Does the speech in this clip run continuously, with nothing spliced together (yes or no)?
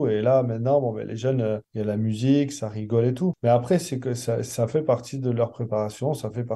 yes